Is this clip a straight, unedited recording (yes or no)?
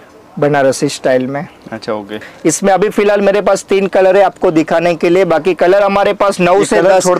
no